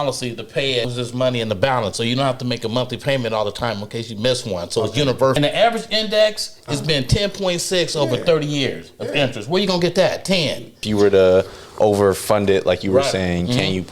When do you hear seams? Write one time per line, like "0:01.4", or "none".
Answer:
0:00.9
0:05.4
0:10.8